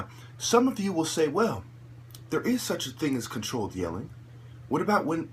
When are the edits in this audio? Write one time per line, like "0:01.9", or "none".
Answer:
0:01.6